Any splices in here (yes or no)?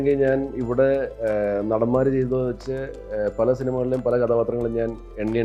no